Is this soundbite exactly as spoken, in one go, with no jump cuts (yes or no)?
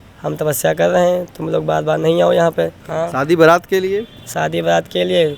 no